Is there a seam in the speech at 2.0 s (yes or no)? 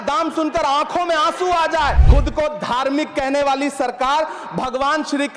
yes